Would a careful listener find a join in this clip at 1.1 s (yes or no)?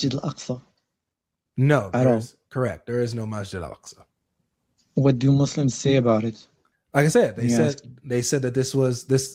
no